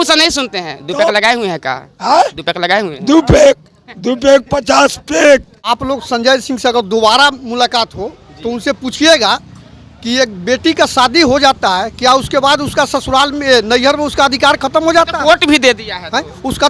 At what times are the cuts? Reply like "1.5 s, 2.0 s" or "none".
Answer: 5.6 s